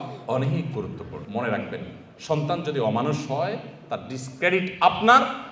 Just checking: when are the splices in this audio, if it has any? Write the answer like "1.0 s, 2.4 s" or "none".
1.2 s